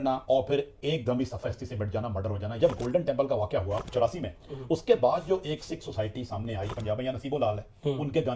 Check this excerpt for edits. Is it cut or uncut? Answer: cut